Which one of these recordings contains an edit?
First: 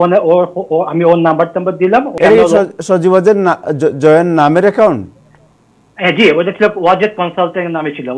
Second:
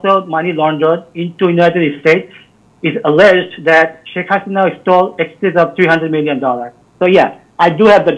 first; 1 cut; at 2.2 s

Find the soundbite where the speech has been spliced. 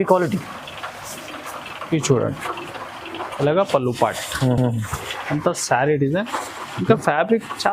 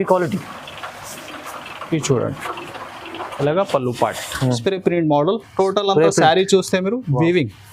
second; 1 cut; at 4.6 s

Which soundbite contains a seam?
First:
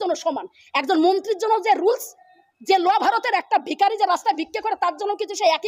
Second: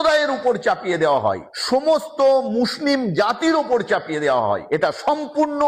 second; 2 cuts; at 1.5 s, 4.6 s

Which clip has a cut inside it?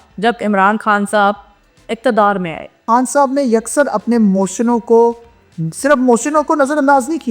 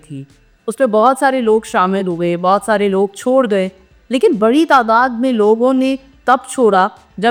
first; 1 cut; at 2.8 s

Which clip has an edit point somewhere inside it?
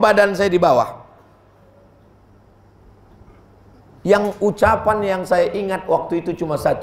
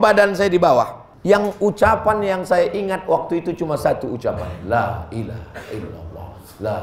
second; 1 cut; at 1.0 s

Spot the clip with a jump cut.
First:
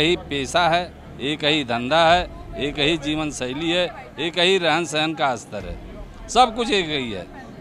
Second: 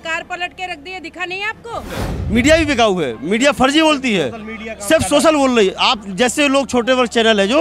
second; 1 cut; at 2.1 s

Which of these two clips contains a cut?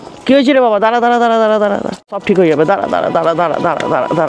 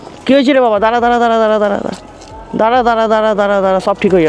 first; 1 cut; at 2.2 s

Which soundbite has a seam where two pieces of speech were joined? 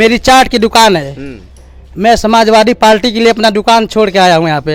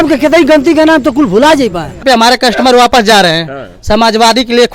second; 1 cut; at 2.0 s

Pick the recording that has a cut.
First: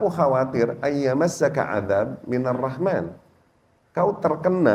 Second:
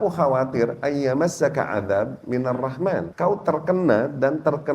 second; 1 cut; at 3.1 s

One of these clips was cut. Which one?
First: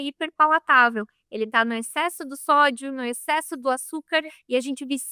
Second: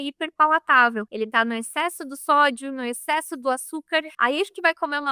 second; 2 cuts; at 1.1 s, 4.1 s

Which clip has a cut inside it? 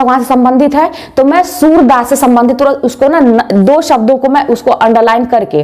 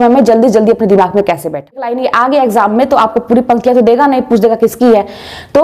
second; 1 cut; at 1.9 s

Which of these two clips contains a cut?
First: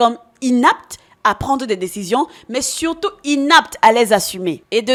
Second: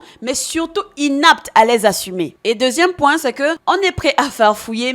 second; 1 cut; at 3.6 s

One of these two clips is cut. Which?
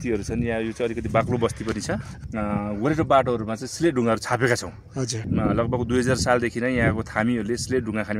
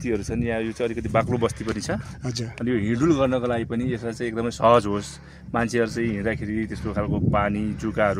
first; 2 cuts; at 2.2 s, 5.2 s

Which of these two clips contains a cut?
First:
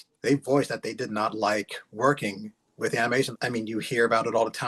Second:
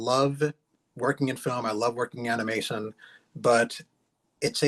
first; 1 cut; at 3.3 s

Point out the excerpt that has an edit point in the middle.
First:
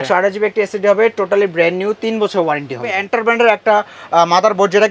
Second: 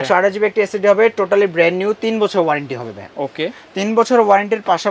first; 1 cut; at 3.0 s

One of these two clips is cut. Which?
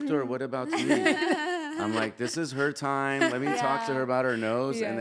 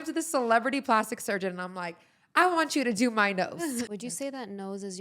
second; 1 cut; at 3.9 s

